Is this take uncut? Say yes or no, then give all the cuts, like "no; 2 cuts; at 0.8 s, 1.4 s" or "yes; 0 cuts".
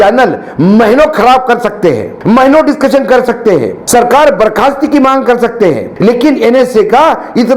no; 3 cuts; at 2.1 s, 3.8 s, 5.9 s